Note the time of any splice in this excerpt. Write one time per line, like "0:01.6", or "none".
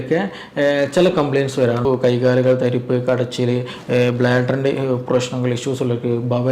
0:01.8